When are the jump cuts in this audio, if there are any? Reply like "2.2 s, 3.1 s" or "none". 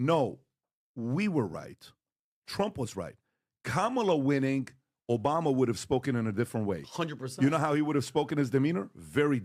none